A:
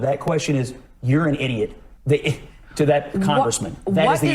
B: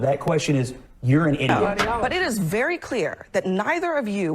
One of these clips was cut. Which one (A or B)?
B